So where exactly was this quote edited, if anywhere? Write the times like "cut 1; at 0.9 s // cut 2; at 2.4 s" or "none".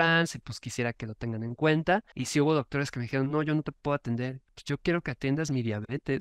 cut 1; at 2.2 s // cut 2; at 4.5 s